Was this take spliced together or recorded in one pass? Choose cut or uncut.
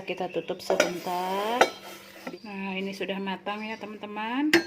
cut